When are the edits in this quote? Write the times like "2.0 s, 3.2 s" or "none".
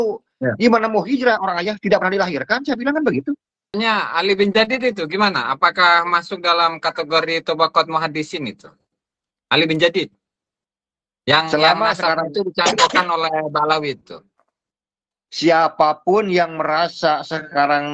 3.7 s